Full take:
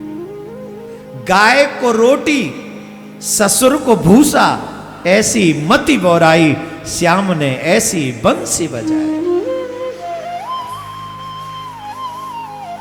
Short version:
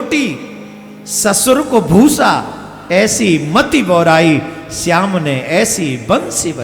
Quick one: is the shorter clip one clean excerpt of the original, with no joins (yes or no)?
yes